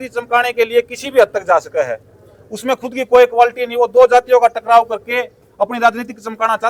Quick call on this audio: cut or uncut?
uncut